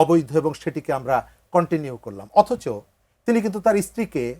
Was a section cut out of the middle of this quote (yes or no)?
no